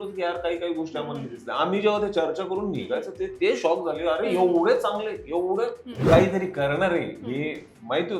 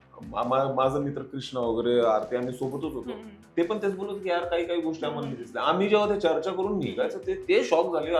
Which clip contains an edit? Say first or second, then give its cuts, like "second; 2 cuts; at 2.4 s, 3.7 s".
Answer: first; 1 cut; at 5.9 s